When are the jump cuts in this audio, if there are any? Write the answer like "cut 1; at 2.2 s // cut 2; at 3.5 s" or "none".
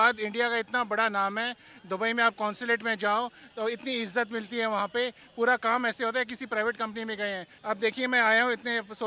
cut 1; at 7.5 s